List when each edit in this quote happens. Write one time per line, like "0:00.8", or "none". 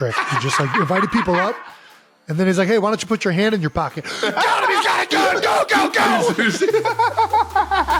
none